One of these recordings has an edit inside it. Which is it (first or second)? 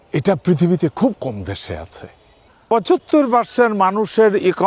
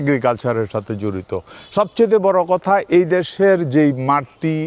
first